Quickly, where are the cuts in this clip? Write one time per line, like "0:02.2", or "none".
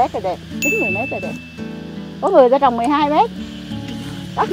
none